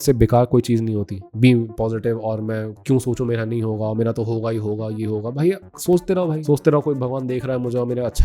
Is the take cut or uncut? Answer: cut